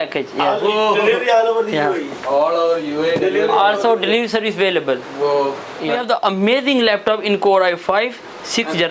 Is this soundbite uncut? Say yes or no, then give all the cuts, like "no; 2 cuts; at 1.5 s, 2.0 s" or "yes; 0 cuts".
no; 1 cut; at 6.0 s